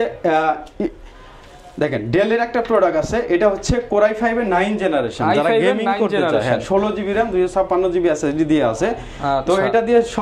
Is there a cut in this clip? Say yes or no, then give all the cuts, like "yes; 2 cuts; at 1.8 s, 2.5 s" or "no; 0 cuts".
no; 0 cuts